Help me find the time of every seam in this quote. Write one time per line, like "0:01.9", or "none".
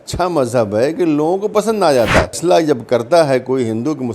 0:02.4